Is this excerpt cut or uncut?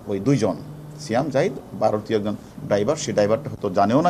uncut